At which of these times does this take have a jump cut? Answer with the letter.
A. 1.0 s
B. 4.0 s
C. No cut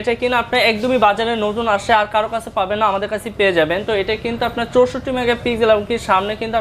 C